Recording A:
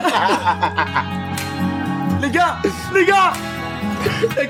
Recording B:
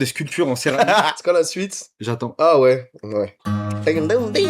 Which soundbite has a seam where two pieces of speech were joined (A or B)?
B